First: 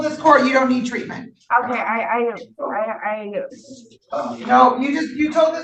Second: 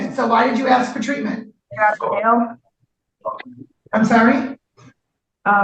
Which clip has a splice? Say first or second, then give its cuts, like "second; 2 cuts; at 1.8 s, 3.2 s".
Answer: second; 1 cut; at 1.6 s